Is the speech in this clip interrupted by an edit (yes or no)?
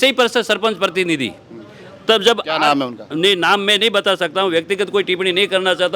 no